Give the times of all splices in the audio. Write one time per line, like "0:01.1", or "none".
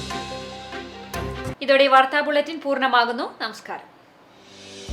none